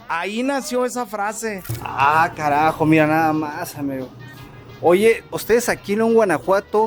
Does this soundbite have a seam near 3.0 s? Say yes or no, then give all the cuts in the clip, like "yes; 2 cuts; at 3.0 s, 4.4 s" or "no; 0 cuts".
no; 2 cuts; at 1.6 s, 5.3 s